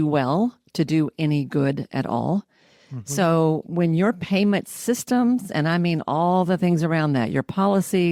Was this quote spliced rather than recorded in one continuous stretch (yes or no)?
no